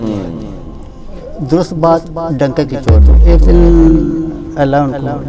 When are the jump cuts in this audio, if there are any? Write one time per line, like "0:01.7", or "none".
0:03.2